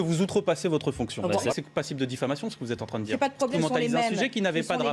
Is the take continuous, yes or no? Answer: no